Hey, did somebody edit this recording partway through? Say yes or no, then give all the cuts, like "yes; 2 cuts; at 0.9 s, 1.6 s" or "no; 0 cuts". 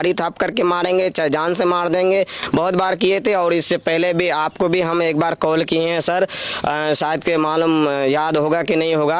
no; 0 cuts